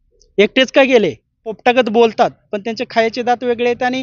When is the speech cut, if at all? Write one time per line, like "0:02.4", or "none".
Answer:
0:01.6

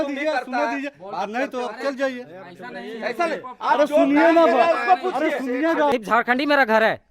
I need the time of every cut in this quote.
0:05.9

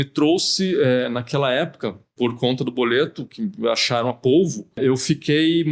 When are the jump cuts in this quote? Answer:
0:04.7

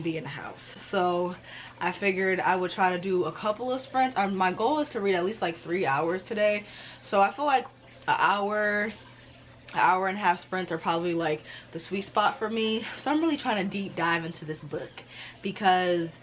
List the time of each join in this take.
none

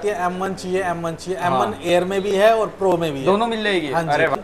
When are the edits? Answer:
none

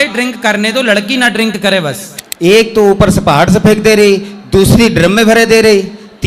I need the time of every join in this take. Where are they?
0:02.1

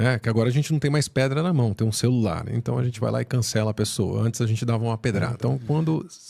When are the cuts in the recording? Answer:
0:05.3

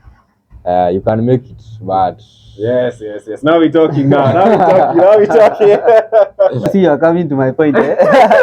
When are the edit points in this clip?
0:06.7

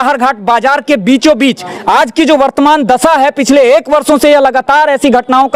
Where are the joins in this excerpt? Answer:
0:01.7

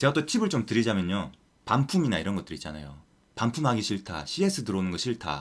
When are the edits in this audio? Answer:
0:01.5

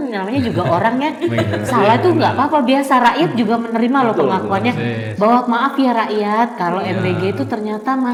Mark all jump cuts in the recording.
none

